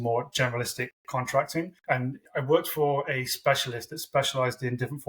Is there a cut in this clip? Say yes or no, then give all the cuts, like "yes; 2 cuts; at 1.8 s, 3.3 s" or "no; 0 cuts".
yes; 1 cut; at 2.0 s